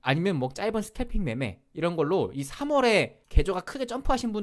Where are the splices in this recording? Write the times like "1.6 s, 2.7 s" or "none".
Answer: none